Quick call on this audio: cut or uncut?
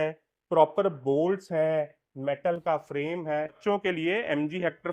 cut